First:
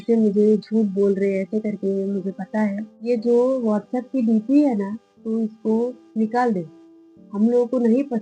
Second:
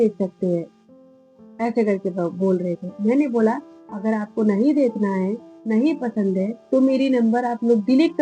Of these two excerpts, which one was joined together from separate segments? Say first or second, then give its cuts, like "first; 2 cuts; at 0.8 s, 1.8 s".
first; 1 cut; at 2.9 s